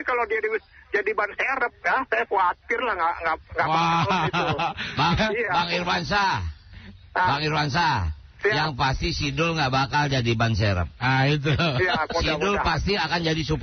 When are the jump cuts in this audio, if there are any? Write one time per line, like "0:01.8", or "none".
none

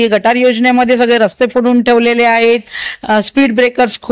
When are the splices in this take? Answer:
none

